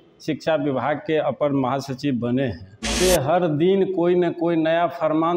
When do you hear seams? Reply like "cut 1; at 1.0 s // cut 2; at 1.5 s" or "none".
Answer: cut 1; at 2.9 s